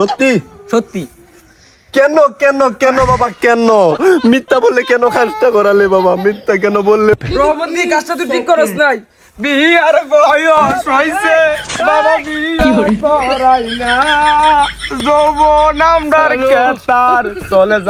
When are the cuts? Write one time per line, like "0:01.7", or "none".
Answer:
none